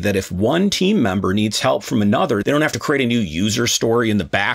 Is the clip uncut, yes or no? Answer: yes